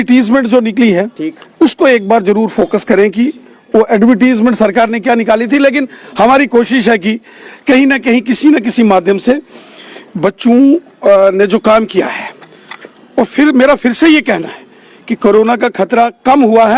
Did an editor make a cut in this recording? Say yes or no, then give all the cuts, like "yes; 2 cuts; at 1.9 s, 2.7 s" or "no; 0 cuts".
no; 0 cuts